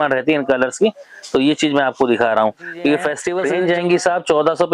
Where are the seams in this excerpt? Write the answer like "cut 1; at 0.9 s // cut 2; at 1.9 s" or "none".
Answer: cut 1; at 3.3 s